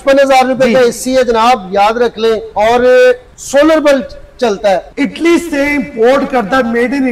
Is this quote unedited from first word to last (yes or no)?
no